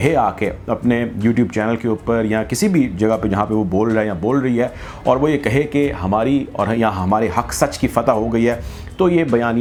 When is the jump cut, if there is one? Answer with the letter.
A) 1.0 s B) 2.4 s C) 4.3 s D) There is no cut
D